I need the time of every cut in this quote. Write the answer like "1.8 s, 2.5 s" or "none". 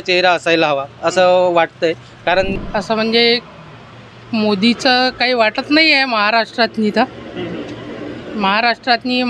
2.5 s